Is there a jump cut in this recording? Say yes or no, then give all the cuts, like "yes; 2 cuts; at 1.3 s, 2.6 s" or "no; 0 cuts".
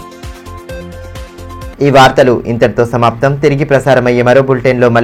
no; 0 cuts